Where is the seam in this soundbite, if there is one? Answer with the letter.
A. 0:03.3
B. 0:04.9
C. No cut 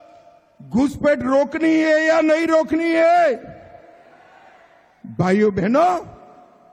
C